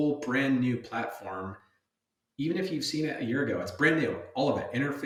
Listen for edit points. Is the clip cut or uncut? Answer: uncut